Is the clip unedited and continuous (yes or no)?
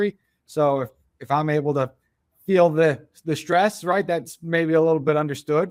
yes